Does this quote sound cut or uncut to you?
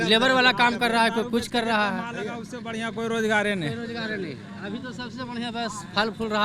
uncut